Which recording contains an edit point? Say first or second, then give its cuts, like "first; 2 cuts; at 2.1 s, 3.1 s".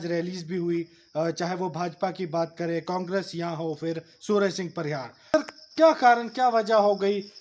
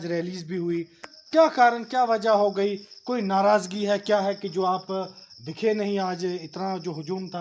second; 1 cut; at 1.1 s